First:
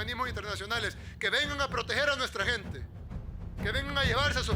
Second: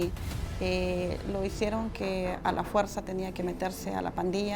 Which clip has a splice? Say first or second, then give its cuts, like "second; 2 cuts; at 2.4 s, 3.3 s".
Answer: first; 1 cut; at 2.8 s